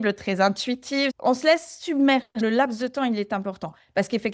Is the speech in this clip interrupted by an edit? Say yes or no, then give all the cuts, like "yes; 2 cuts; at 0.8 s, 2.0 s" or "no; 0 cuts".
yes; 2 cuts; at 1.1 s, 2.3 s